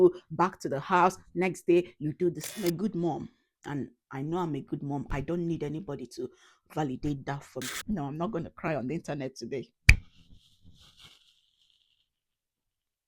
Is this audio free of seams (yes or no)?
no